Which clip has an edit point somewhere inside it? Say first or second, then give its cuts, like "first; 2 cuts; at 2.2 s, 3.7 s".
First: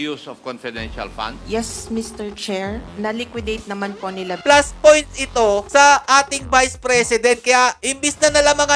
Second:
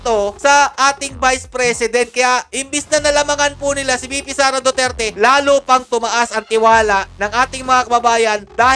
first; 3 cuts; at 1.4 s, 2.9 s, 4.4 s